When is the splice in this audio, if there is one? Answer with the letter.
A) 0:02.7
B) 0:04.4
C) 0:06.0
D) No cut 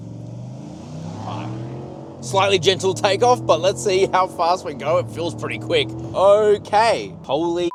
D